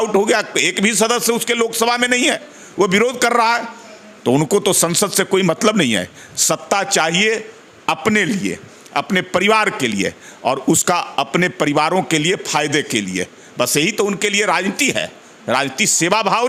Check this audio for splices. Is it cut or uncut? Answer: uncut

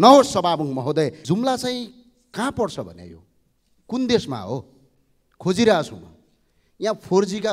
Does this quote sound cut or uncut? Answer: cut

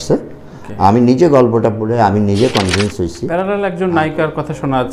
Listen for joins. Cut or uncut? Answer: cut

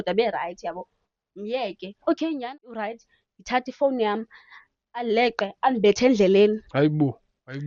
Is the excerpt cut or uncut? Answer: cut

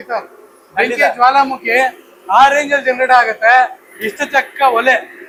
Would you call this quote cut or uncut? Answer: uncut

